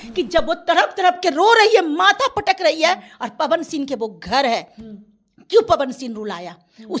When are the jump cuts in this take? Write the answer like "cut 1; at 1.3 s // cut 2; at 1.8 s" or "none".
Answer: none